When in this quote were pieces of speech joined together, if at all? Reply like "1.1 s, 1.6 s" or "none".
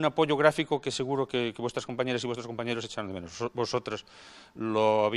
3.2 s